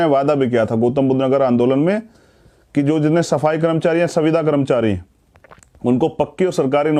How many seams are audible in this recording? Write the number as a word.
zero